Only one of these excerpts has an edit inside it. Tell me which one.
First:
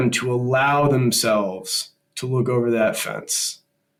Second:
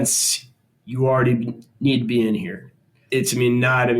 second; 1 cut; at 3.0 s

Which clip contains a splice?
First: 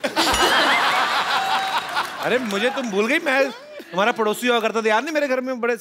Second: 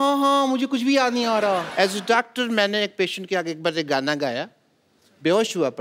second; 1 cut; at 1.7 s

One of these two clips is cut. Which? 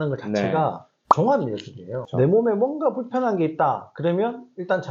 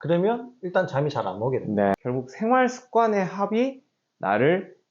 second; 1 cut; at 2.0 s

